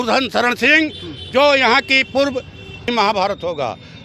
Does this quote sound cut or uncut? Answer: cut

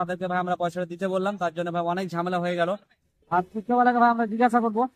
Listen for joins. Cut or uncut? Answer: uncut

